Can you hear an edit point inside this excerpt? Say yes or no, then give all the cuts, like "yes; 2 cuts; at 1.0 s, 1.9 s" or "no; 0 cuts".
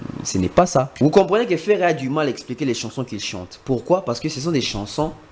yes; 1 cut; at 0.9 s